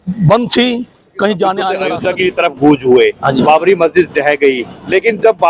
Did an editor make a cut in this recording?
yes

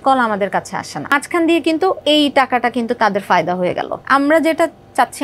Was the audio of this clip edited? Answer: yes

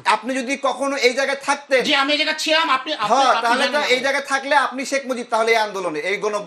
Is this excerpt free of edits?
yes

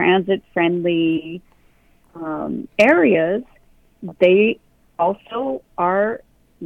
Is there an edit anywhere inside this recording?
no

